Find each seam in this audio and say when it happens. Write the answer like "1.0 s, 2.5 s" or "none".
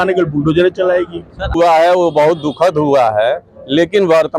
1.5 s